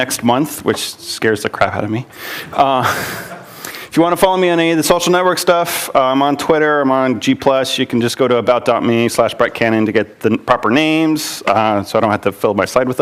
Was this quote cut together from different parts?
no; 0 cuts

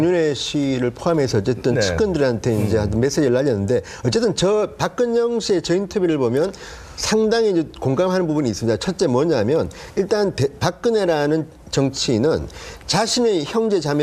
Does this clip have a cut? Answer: yes; 1 cut; at 4.4 s

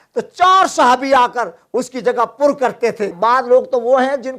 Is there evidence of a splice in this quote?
yes; 1 cut; at 3.1 s

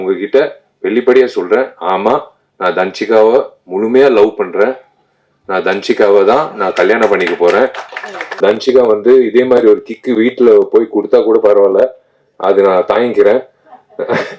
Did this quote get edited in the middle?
yes; 1 cut; at 8.4 s

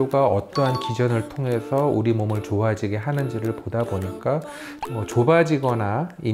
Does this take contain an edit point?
yes; 1 cut; at 4.8 s

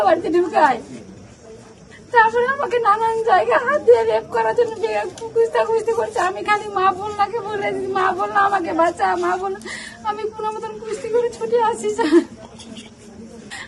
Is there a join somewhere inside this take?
no; 0 cuts

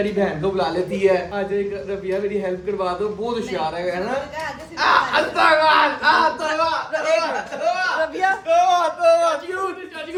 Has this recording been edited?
no; 0 cuts

